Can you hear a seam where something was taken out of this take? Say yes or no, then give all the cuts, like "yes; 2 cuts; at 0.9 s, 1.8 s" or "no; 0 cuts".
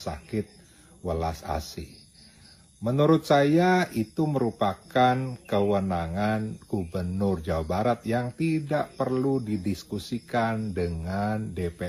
no; 0 cuts